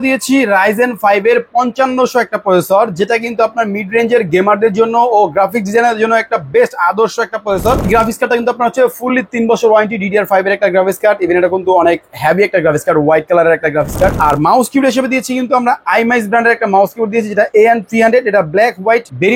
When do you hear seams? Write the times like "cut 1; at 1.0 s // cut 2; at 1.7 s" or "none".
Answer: cut 1; at 7.9 s // cut 2; at 14.1 s